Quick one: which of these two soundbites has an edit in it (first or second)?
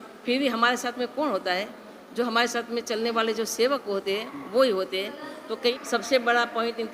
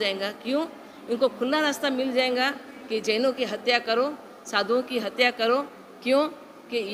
first